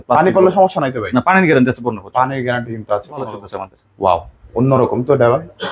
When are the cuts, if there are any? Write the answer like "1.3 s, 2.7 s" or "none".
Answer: 3.3 s